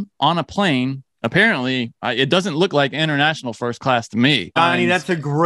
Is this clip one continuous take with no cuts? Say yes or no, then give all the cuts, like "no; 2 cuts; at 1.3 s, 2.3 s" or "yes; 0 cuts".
no; 1 cut; at 4.5 s